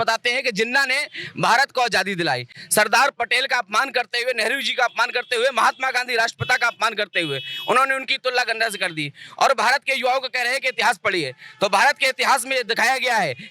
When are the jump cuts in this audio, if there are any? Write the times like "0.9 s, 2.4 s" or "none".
none